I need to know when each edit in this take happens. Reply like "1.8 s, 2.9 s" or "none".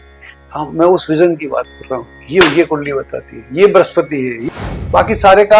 4.4 s